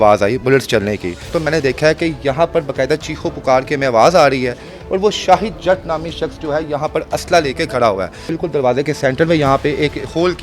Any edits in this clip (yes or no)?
yes